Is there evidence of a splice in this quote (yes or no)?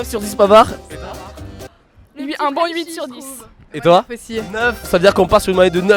no